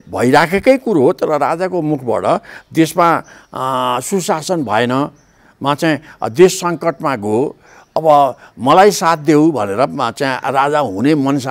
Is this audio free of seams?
yes; 0 cuts

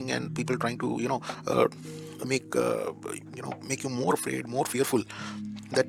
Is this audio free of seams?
yes; 0 cuts

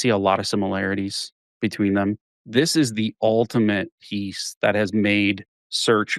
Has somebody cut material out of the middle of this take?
yes; 1 cut; at 2.3 s

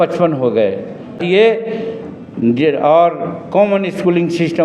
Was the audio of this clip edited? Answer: yes; 1 cut; at 1.2 s

